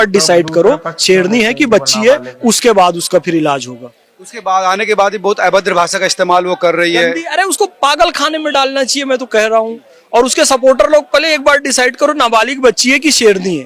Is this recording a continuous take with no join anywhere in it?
yes; 0 cuts

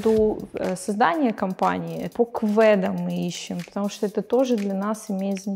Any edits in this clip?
yes; 1 cut; at 2.0 s

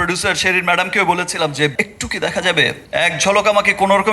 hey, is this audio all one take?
no; 2 cuts; at 1.7 s, 2.8 s

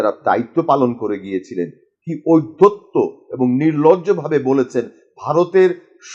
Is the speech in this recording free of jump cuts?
yes; 0 cuts

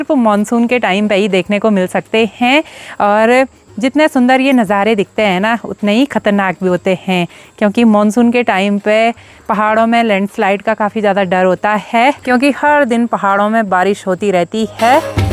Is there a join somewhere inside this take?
no; 0 cuts

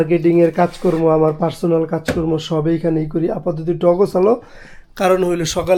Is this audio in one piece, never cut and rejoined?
yes; 0 cuts

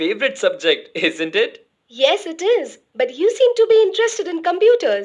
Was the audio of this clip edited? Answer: yes; 1 cut; at 2.8 s

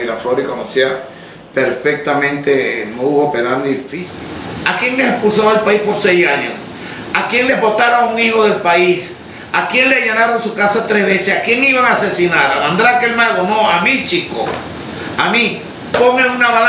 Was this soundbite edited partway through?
yes; 1 cut; at 3.9 s

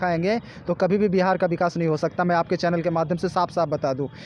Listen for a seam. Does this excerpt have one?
no; 0 cuts

